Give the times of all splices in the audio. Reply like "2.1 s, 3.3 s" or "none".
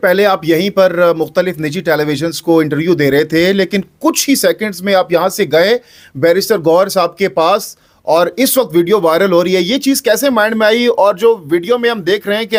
none